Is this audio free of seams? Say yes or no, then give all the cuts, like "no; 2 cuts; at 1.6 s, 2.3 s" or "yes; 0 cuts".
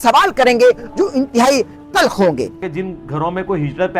no; 1 cut; at 2.7 s